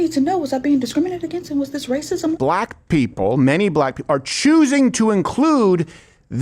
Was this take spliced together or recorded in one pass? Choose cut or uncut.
cut